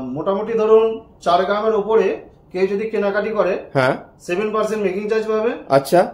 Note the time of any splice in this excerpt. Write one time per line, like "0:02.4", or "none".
none